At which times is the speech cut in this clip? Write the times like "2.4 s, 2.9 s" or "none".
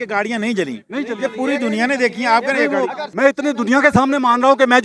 3.1 s